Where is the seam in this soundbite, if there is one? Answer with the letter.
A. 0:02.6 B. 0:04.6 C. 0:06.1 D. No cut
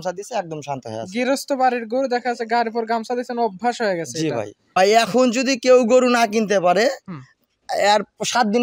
B